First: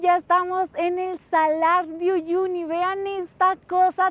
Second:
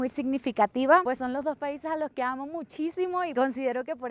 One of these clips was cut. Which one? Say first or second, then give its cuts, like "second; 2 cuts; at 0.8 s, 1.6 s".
second; 2 cuts; at 1.0 s, 3.3 s